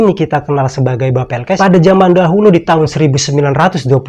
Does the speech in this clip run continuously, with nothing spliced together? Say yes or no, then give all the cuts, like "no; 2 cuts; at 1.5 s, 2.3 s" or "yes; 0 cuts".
no; 1 cut; at 1.6 s